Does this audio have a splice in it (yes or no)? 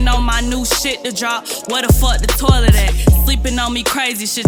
no